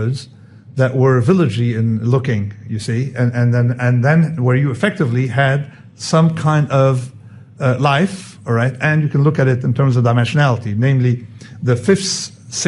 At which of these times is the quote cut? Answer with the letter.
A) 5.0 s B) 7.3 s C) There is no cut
C